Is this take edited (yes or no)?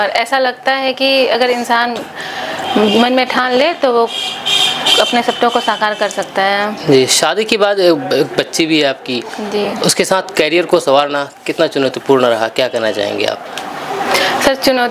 no